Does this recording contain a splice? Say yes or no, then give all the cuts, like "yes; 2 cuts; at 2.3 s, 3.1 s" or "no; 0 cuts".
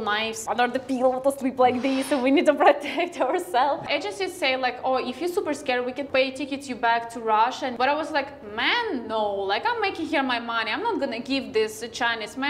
no; 0 cuts